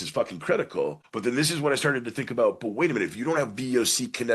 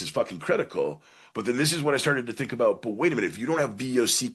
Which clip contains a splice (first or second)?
first